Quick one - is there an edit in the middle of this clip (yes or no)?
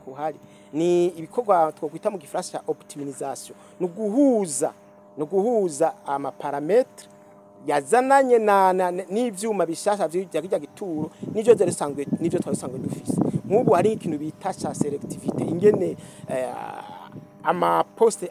no